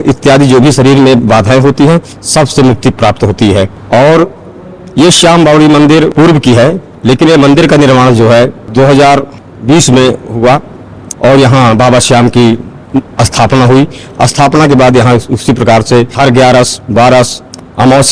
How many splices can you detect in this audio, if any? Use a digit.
0